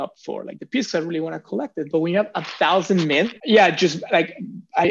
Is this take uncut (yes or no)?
no